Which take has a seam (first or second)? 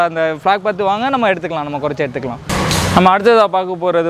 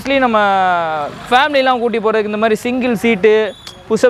first